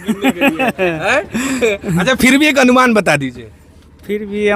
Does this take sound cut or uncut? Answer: uncut